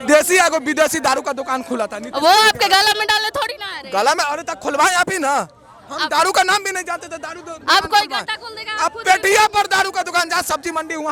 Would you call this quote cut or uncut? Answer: uncut